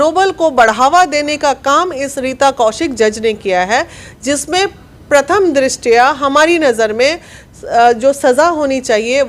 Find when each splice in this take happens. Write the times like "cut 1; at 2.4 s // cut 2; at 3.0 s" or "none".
none